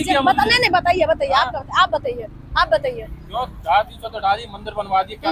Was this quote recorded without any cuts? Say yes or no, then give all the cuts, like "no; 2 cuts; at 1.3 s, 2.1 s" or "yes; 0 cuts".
yes; 0 cuts